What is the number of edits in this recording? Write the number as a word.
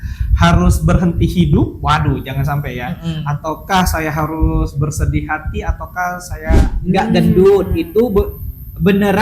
one